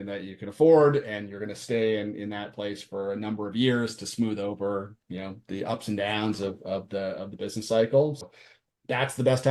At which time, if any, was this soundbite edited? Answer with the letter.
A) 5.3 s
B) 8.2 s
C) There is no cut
B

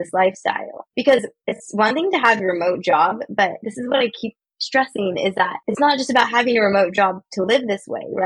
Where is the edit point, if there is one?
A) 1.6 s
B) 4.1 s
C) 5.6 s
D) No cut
D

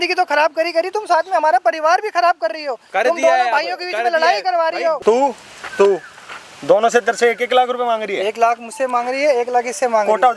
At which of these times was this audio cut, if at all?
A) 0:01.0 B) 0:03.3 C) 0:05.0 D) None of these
C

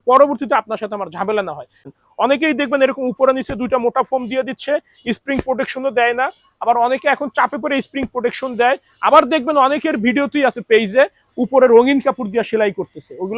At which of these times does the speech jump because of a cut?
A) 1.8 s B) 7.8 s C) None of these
A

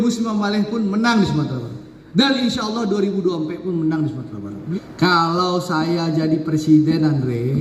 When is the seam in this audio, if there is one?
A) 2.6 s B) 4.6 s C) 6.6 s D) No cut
B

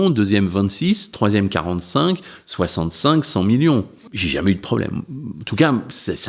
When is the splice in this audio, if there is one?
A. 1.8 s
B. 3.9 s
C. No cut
B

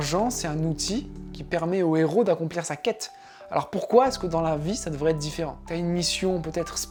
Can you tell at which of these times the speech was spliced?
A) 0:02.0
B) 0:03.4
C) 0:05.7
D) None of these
D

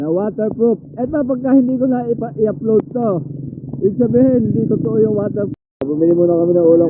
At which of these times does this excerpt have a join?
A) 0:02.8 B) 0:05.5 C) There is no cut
B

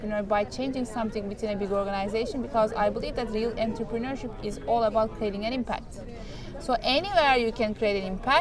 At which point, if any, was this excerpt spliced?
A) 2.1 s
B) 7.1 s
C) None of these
C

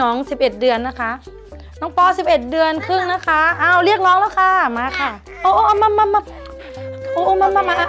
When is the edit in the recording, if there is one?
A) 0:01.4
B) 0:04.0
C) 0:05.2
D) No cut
C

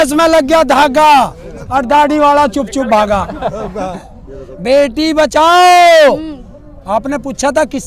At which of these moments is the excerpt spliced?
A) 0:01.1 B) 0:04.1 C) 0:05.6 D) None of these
B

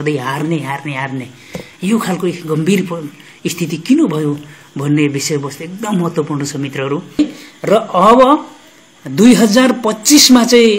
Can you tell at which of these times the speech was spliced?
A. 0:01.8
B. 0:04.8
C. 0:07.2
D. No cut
C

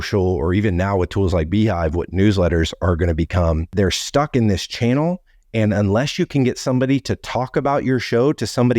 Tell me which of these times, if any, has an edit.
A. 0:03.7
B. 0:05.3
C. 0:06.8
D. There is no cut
A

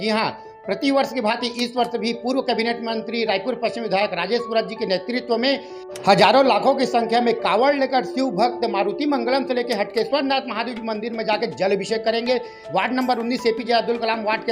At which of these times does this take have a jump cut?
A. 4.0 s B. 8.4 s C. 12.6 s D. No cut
C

